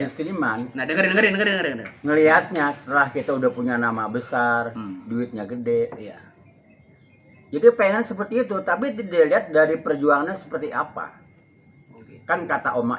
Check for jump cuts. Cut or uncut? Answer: uncut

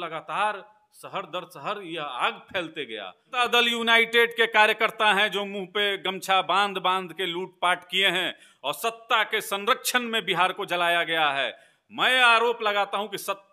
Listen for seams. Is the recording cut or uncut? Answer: cut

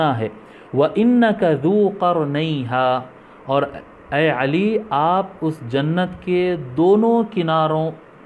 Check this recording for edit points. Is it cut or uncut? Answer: uncut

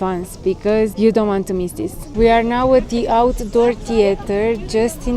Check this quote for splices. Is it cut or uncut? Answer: cut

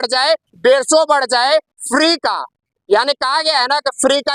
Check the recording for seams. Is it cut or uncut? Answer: uncut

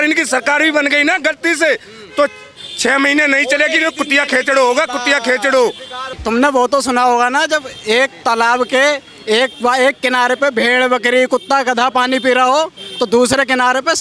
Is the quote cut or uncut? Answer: cut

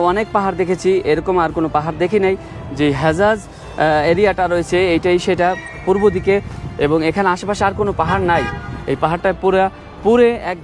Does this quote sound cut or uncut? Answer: uncut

